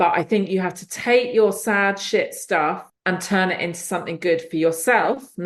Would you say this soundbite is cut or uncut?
cut